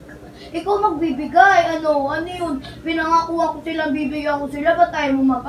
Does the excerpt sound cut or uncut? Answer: cut